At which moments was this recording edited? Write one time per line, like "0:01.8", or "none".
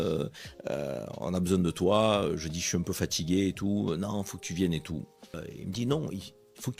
0:05.2